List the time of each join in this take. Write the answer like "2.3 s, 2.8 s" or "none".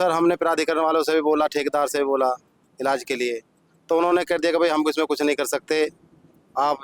none